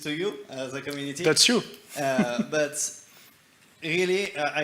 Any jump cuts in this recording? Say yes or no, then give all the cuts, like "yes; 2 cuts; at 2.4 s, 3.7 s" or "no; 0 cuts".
no; 0 cuts